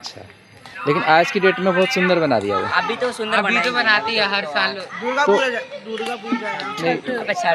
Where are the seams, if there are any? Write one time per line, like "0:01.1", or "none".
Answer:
none